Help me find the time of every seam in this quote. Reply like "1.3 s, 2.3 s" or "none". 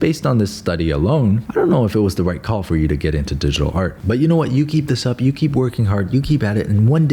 none